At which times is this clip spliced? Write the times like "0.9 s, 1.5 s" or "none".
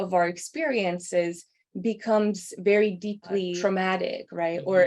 3.5 s